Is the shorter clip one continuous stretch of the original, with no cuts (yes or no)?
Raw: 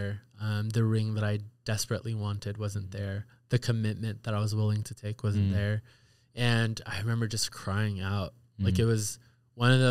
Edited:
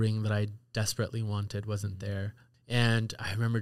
no